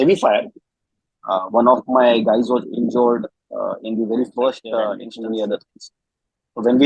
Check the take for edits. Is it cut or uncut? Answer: cut